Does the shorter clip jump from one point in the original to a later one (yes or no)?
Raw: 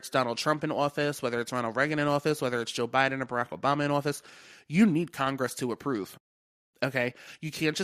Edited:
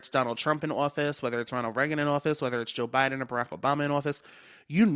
no